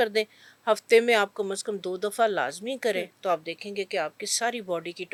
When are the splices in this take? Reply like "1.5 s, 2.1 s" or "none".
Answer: none